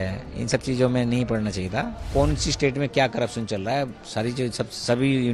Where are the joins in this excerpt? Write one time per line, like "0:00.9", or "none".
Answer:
0:02.0